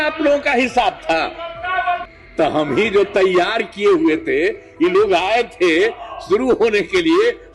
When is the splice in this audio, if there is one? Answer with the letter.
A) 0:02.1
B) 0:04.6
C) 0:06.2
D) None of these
A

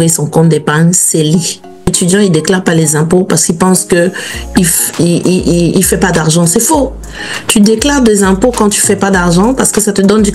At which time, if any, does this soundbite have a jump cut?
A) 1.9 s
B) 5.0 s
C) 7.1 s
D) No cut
A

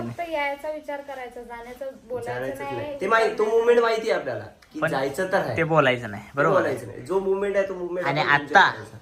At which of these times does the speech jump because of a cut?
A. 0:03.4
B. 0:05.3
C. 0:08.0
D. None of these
D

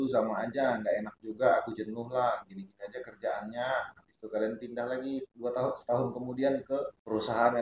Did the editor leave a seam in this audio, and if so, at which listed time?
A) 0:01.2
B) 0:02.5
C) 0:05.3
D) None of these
C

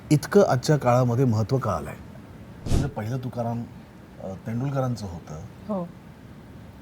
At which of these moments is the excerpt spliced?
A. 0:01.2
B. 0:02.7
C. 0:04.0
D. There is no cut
B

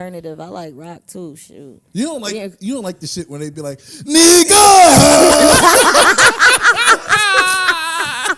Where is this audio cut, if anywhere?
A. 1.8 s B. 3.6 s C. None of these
A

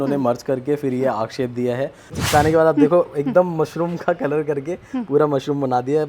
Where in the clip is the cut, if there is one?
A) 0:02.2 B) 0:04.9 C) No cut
A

